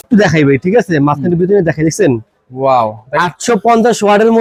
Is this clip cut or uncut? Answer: uncut